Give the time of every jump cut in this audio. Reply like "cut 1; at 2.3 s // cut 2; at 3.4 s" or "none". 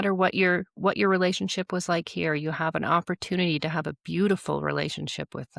none